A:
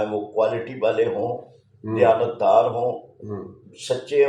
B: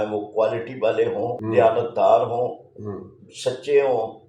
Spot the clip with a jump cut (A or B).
B